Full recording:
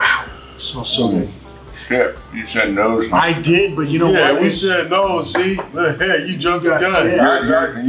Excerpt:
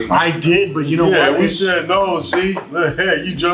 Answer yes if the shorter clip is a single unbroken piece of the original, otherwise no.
yes